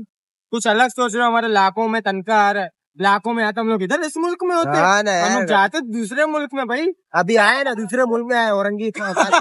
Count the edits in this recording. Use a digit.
0